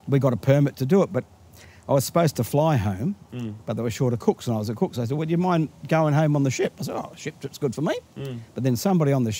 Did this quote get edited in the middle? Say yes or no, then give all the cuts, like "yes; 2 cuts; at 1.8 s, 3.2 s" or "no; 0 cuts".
no; 0 cuts